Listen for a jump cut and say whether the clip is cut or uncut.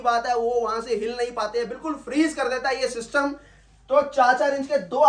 uncut